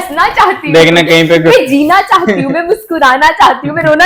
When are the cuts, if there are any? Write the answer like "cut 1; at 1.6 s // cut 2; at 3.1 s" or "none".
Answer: none